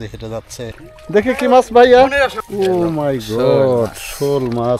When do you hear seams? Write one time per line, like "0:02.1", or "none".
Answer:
0:01.1
0:02.4

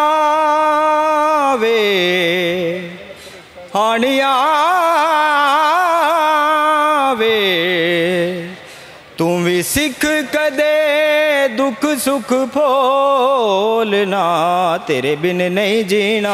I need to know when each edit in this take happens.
none

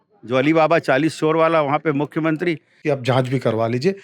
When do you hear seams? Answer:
0:02.7

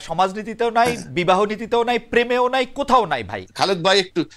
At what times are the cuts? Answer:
0:03.4

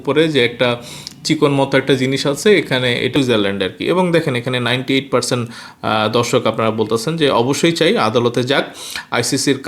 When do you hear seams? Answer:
0:03.1

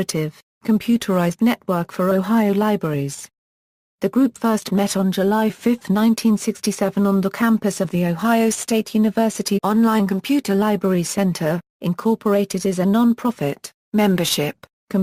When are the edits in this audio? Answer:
none

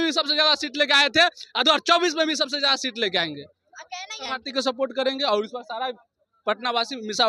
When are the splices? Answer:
0:04.3

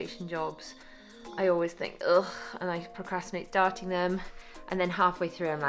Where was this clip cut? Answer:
none

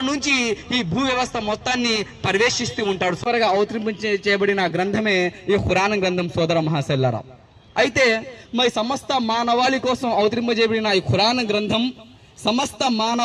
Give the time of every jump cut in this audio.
0:03.2

